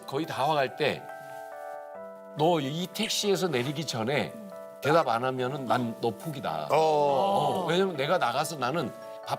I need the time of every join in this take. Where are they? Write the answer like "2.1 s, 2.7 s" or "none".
none